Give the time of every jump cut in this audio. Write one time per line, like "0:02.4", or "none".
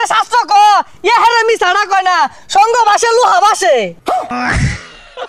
0:04.3